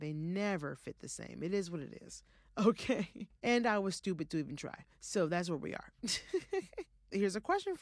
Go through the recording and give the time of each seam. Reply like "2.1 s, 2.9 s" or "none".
none